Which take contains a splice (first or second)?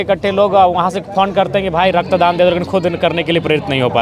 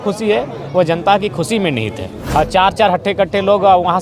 second